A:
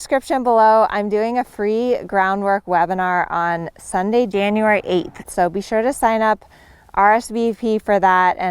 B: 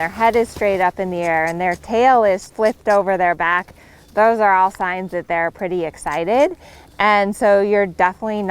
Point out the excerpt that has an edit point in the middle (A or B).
B